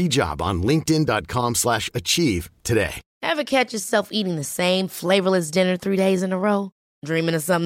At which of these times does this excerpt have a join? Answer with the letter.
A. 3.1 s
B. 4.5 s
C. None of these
A